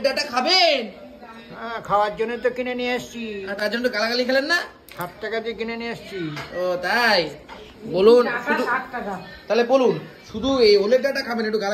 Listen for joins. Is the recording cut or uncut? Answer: uncut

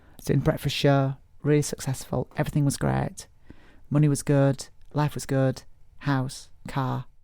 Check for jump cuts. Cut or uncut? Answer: cut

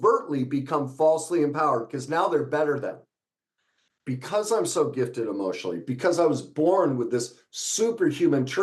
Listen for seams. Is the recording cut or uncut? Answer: uncut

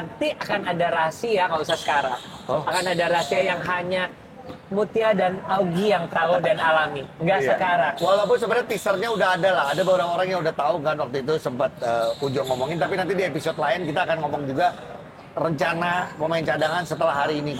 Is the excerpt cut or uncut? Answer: uncut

